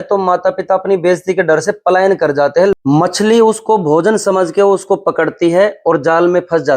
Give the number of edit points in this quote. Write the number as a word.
one